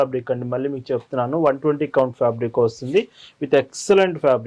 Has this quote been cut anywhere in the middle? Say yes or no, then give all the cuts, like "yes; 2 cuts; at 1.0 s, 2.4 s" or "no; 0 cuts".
no; 0 cuts